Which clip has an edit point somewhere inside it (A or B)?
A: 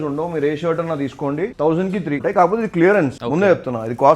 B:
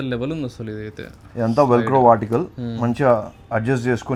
A